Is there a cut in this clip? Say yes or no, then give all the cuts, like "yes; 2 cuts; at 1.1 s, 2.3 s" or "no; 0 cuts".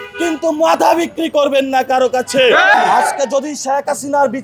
yes; 1 cut; at 2.7 s